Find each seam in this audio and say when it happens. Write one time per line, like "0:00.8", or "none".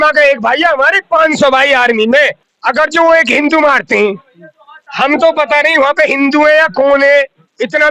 0:02.5